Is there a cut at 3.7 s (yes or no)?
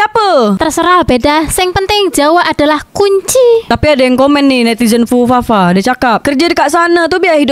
yes